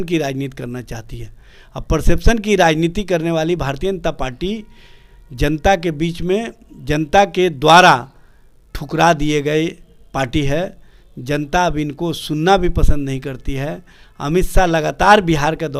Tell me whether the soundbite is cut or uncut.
uncut